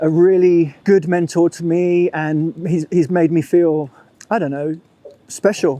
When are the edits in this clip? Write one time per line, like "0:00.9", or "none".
none

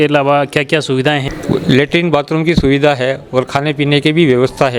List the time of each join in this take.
0:01.3

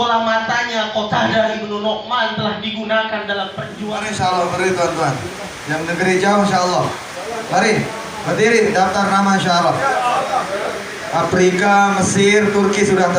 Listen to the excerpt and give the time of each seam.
0:03.7

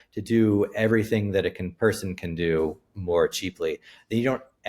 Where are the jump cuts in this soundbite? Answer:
none

